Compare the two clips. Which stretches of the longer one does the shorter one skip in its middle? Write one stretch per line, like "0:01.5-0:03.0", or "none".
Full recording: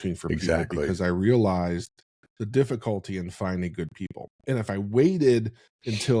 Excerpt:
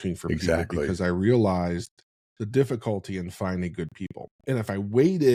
none